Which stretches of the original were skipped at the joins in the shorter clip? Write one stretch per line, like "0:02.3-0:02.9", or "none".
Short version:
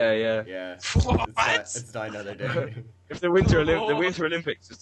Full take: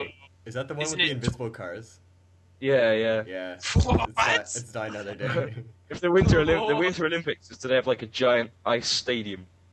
none